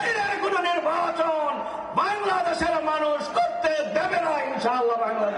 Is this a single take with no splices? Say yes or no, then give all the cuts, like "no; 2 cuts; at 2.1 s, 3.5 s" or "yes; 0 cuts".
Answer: yes; 0 cuts